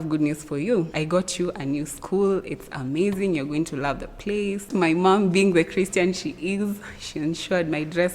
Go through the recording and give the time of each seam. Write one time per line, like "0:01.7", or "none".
0:00.9
0:04.7